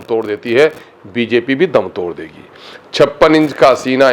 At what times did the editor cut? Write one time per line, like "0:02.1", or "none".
none